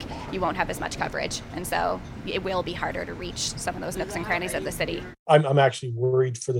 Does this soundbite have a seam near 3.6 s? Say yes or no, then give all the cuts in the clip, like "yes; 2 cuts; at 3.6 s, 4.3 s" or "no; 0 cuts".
no; 1 cut; at 5.1 s